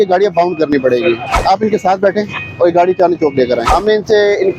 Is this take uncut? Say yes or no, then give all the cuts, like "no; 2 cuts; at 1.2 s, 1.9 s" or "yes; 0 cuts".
no; 2 cuts; at 1.3 s, 3.6 s